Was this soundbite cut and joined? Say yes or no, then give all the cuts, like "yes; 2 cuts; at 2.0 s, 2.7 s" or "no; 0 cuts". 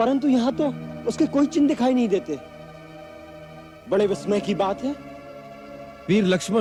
no; 0 cuts